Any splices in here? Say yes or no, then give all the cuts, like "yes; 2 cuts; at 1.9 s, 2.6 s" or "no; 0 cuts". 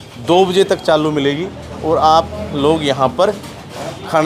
no; 0 cuts